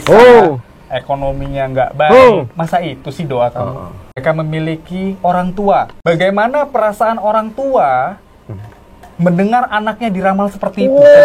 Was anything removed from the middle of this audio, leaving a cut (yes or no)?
yes